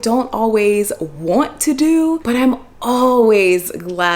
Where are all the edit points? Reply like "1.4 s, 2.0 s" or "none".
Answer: none